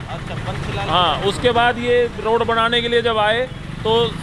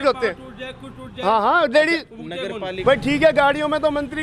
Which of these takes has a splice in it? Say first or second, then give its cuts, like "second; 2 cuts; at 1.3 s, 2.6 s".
second; 1 cut; at 2.7 s